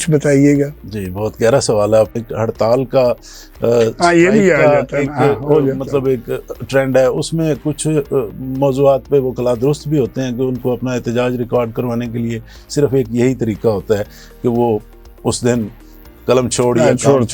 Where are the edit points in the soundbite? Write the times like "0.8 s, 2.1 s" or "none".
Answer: 2.1 s

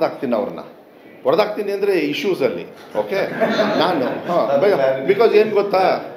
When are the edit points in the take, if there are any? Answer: none

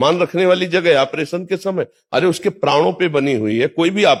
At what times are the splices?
none

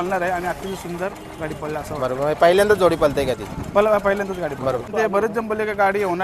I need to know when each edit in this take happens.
4.9 s

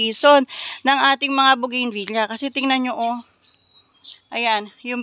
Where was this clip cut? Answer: none

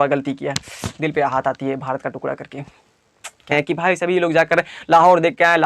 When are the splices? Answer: 3.5 s

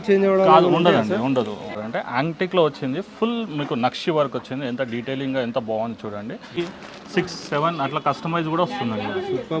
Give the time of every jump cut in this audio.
1.7 s, 6.6 s

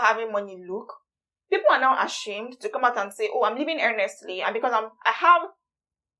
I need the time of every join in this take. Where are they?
none

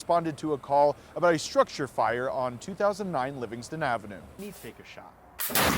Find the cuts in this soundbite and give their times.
4.4 s

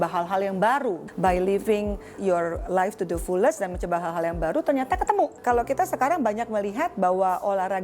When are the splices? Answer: 1.1 s, 2.2 s, 5.4 s

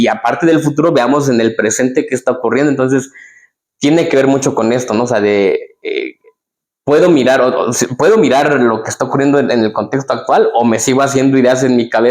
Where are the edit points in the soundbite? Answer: none

